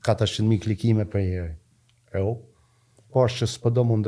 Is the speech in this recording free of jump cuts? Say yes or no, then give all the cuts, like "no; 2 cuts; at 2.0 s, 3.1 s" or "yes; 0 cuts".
no; 1 cut; at 3.0 s